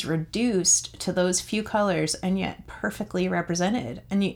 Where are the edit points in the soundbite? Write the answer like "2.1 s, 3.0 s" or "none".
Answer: none